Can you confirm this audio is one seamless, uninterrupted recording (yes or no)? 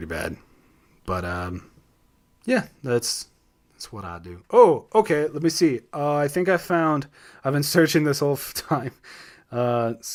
yes